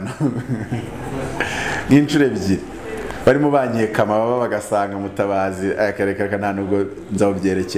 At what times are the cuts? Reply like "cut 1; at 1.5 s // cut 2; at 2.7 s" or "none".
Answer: none